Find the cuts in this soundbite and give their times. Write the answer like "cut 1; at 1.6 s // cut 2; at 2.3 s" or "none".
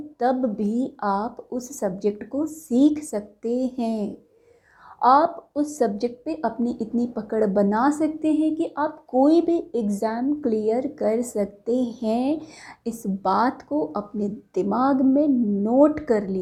none